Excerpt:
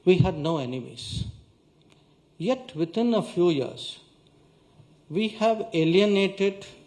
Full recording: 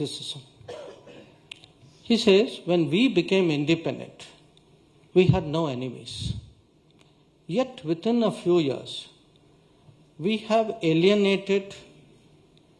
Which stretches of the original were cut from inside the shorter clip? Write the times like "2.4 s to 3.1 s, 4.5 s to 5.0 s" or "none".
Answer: none